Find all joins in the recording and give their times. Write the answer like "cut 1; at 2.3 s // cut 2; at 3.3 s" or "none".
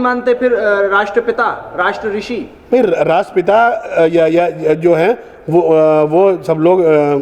none